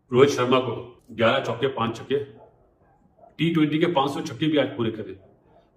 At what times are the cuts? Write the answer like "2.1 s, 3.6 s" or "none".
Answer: 1.0 s